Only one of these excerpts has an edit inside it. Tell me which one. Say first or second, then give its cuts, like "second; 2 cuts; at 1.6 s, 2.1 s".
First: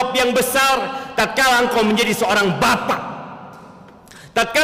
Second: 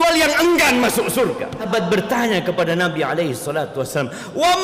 second; 1 cut; at 1.7 s